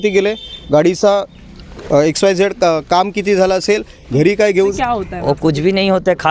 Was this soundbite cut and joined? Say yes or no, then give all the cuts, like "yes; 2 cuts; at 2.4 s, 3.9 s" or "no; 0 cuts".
yes; 1 cut; at 4.7 s